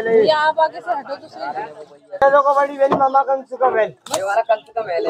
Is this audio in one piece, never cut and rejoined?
no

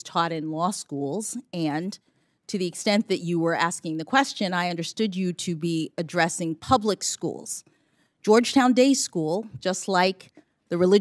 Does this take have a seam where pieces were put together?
no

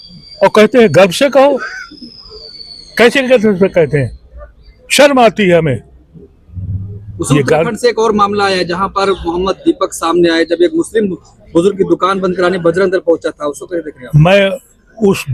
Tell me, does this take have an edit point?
no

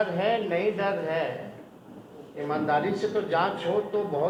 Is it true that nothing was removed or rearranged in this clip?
yes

